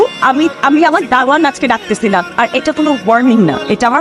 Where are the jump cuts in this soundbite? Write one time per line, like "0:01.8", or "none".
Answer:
none